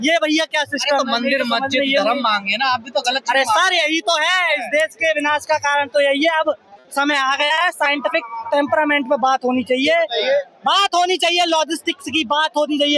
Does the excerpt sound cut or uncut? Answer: uncut